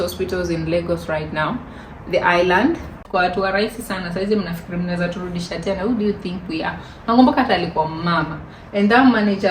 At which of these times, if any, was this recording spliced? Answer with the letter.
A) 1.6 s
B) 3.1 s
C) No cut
B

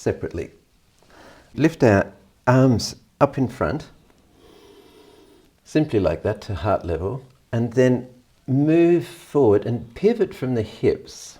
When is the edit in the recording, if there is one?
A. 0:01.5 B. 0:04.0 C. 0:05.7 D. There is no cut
A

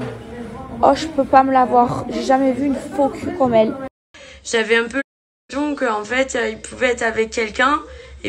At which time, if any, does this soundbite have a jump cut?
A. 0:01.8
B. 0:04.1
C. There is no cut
B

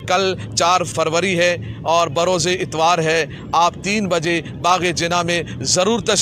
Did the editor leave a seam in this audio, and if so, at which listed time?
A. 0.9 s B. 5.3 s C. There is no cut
A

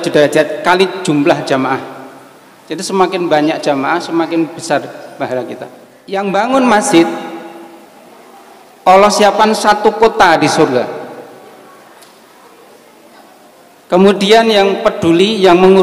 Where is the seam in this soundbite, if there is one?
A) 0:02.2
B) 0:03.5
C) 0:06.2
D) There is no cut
C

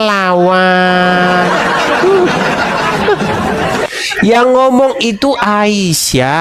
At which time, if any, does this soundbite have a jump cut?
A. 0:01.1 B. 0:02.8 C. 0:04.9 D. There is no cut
B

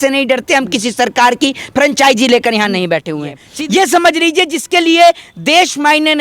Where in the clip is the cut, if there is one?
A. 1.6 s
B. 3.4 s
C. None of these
B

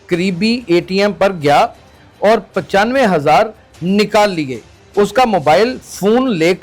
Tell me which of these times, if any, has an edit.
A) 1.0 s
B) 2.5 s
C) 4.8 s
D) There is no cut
C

